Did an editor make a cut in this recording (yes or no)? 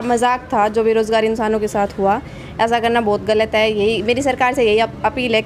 no